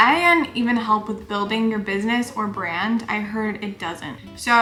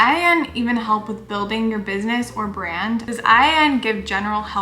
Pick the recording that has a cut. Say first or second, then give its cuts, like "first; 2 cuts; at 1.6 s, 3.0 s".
second; 1 cut; at 3.1 s